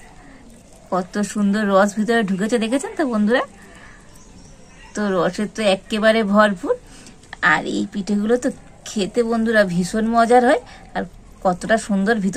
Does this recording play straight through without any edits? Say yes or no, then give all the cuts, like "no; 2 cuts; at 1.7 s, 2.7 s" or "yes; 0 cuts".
yes; 0 cuts